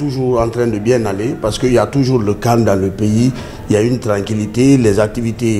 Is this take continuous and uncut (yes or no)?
yes